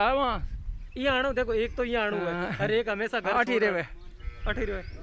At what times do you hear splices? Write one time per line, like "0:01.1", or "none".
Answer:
none